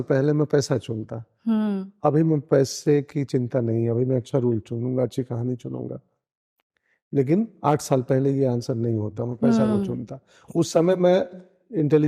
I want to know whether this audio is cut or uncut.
uncut